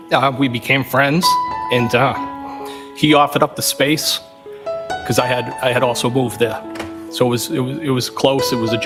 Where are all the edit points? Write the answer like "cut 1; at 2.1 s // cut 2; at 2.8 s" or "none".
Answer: none